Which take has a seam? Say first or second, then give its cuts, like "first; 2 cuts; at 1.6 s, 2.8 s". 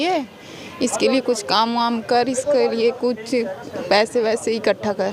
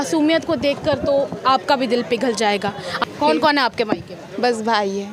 second; 1 cut; at 2.9 s